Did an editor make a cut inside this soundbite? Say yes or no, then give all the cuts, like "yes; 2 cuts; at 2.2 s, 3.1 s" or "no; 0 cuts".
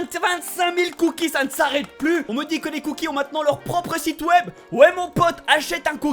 yes; 1 cut; at 2.3 s